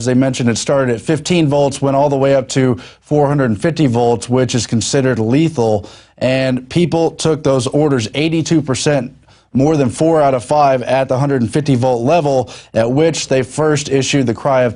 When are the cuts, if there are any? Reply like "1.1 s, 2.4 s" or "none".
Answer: none